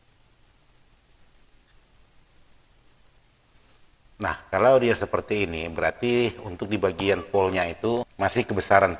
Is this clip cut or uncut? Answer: cut